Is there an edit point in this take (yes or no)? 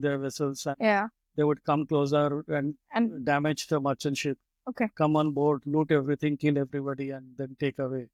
no